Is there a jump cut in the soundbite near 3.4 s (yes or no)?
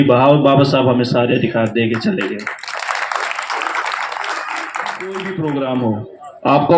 no